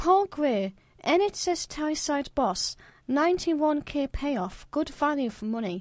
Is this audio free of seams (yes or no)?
yes